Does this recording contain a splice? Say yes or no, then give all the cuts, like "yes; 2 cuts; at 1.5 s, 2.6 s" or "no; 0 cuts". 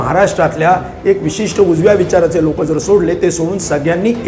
no; 0 cuts